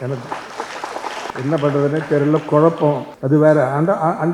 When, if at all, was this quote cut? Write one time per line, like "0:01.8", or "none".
0:01.3
0:03.1